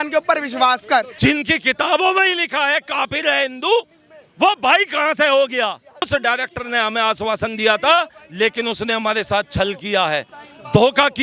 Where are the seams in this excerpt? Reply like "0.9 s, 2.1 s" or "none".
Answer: 1.1 s, 6.1 s